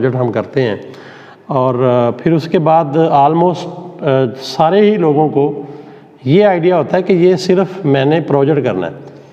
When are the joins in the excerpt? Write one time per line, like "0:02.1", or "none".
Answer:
none